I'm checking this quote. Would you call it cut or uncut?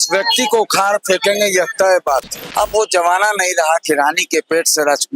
cut